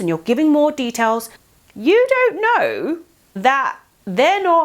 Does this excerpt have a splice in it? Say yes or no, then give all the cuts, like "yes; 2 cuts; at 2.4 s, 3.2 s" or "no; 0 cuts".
no; 0 cuts